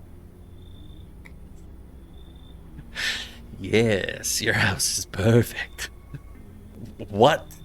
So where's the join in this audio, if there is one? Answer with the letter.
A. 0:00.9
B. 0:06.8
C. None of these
B